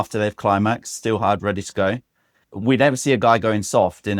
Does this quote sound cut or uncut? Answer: cut